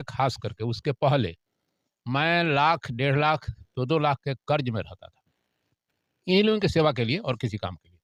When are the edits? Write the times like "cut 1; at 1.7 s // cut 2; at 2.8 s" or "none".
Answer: none